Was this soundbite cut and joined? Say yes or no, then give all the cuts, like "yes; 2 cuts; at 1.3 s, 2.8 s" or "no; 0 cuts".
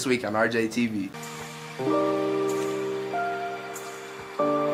no; 0 cuts